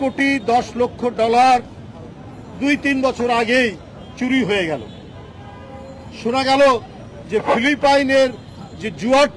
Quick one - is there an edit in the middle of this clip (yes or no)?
no